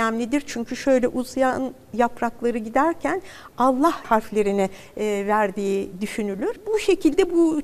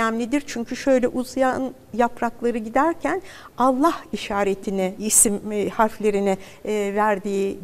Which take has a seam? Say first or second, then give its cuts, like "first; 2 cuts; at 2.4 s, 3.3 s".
first; 2 cuts; at 4.0 s, 6.6 s